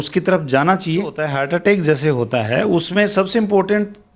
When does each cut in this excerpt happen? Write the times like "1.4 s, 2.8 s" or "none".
1.3 s